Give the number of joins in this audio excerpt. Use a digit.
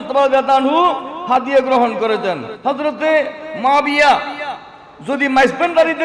1